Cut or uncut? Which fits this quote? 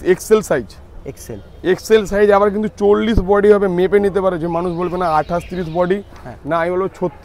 uncut